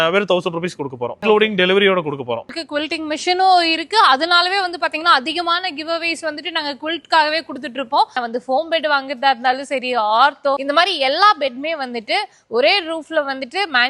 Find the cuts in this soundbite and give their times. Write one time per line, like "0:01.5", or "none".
0:01.1
0:02.6
0:08.1
0:10.6